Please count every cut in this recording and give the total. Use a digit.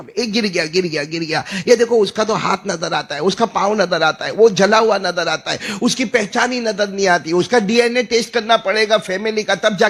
0